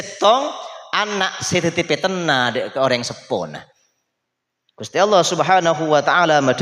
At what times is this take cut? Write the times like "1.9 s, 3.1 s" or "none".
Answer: none